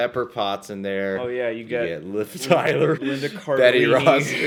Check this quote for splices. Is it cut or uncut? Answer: uncut